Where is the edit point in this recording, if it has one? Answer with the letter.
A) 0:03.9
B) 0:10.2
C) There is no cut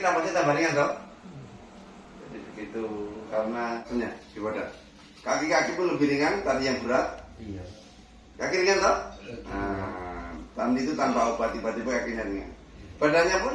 A